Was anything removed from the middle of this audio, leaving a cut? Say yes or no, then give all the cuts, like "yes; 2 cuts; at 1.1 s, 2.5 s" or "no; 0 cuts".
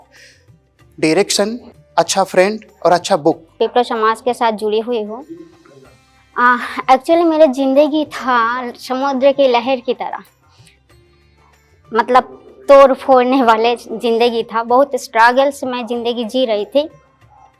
yes; 2 cuts; at 1.7 s, 3.5 s